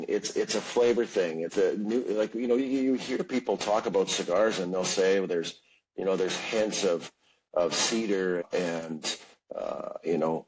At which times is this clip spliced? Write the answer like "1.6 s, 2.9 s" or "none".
1.5 s, 8.4 s

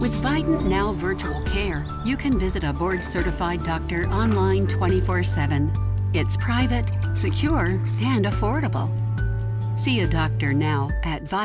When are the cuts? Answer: none

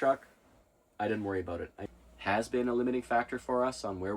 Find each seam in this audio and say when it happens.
1.8 s

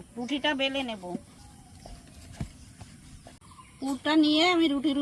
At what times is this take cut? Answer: 1.4 s, 3.4 s

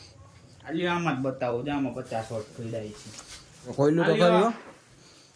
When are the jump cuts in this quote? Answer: 3.7 s

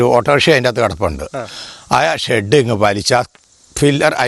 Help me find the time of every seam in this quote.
none

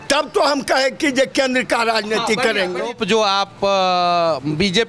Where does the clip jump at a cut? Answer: 2.9 s

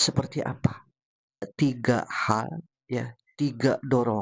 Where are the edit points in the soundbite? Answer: 1.5 s

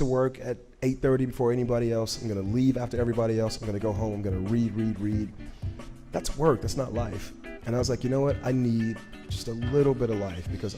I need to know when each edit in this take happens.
none

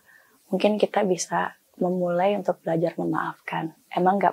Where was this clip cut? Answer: none

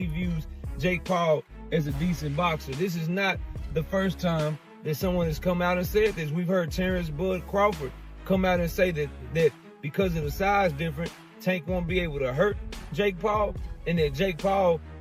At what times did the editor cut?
none

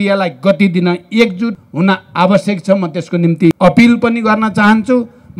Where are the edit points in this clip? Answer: 1.6 s, 3.6 s

